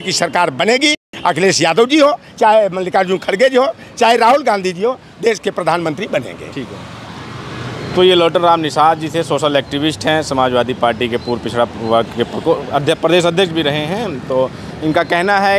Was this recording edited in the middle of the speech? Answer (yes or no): no